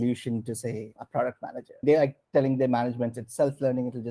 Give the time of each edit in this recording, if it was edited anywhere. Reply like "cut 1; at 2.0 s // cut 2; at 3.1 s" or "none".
cut 1; at 0.9 s